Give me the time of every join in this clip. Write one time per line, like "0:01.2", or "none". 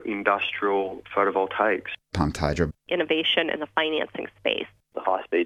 none

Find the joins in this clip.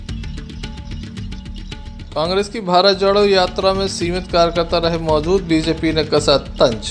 0:01.2
0:02.1

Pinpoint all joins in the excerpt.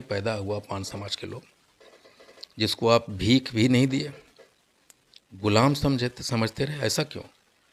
none

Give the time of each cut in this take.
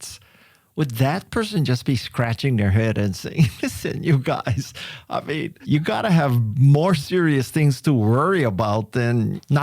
0:05.6
0:06.5

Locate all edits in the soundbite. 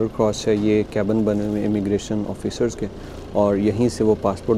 none

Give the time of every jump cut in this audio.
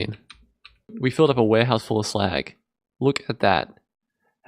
0:00.9

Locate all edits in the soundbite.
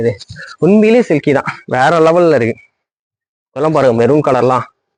none

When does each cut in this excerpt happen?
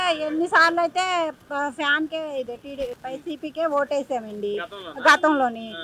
none

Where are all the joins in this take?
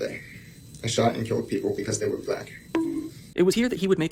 0:03.2

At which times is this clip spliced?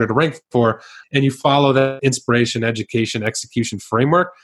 0:00.9
0:02.0

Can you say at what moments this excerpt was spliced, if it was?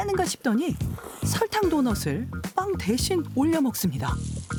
none

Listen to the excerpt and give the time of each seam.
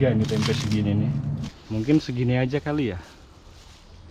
0:01.5

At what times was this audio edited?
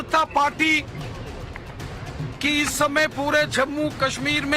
0:01.4

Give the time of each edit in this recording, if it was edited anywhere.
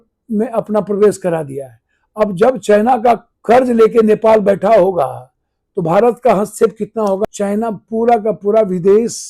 0:03.3
0:07.2

